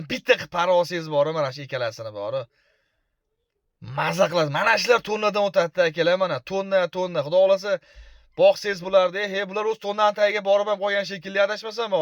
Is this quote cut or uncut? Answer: uncut